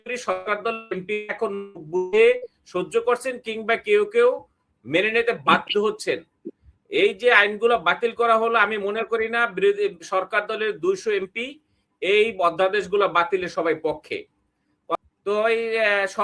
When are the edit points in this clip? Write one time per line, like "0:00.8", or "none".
0:14.9